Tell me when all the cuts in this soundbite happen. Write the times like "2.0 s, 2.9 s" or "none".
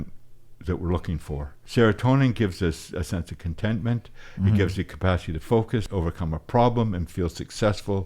1.6 s, 5.9 s